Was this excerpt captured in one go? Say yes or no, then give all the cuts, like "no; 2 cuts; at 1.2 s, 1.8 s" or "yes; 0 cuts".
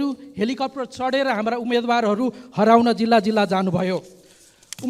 yes; 0 cuts